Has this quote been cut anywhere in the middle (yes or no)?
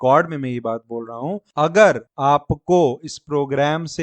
yes